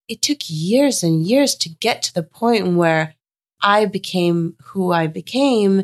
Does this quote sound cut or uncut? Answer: uncut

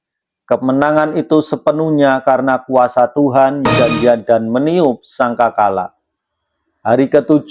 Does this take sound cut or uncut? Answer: cut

